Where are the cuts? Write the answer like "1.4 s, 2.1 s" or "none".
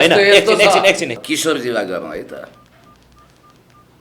1.1 s